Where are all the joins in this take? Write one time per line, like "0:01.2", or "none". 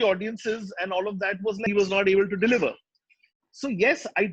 0:01.6